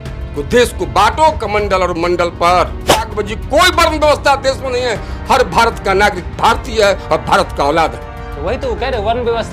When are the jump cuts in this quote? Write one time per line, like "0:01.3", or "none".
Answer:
0:03.1